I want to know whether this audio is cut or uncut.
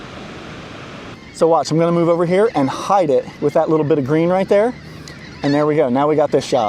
cut